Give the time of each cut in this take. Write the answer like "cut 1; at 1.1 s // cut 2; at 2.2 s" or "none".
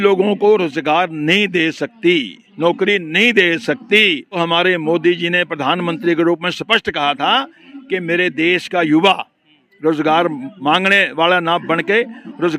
cut 1; at 4.4 s